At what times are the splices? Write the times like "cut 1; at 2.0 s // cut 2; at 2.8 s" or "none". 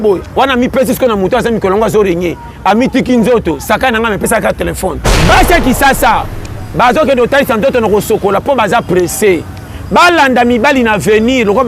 cut 1; at 5.1 s